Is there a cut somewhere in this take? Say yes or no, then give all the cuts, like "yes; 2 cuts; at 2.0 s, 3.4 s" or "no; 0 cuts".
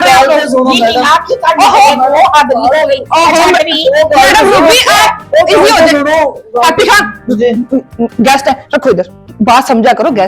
yes; 1 cut; at 9.2 s